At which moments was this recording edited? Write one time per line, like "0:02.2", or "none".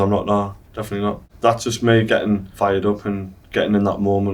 0:01.3